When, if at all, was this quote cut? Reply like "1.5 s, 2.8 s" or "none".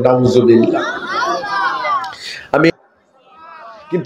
2.7 s

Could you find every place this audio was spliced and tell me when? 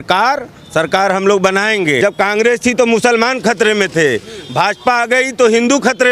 2.0 s

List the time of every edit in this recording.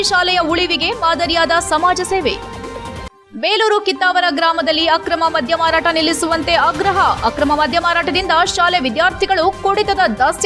none

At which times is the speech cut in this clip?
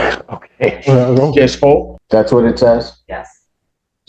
1.9 s

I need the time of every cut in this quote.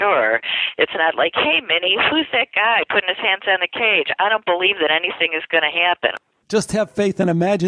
6.2 s

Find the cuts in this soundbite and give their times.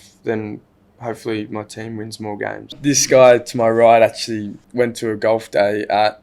2.8 s, 4.6 s

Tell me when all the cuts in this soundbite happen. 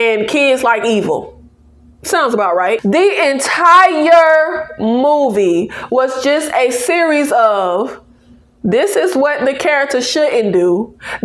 2.8 s

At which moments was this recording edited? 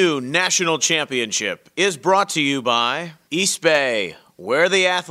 none

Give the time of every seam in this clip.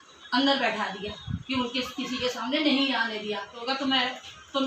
3.6 s

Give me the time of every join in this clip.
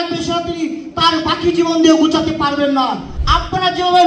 3.1 s

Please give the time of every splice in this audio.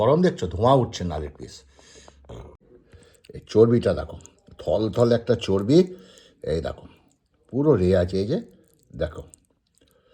2.5 s

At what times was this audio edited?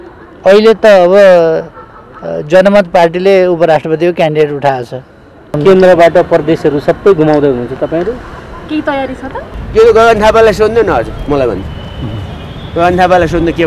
5.5 s, 9.5 s

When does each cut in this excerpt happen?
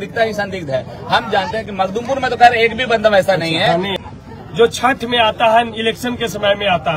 3.9 s

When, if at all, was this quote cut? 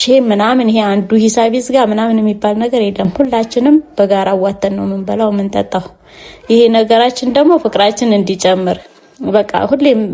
none

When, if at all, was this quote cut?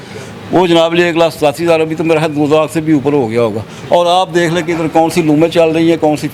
none

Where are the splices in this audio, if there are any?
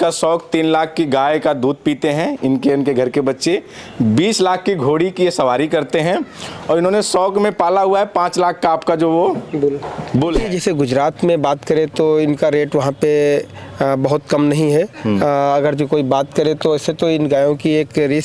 10.4 s

